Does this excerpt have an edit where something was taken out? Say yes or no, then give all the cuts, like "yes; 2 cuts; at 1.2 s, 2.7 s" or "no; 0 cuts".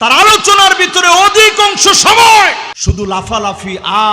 yes; 1 cut; at 2.7 s